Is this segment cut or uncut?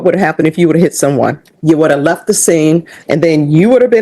cut